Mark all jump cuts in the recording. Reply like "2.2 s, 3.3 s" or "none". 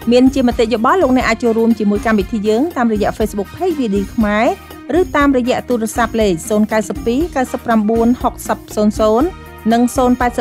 none